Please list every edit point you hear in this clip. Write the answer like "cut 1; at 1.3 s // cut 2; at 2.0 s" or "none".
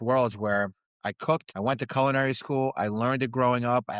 cut 1; at 1.5 s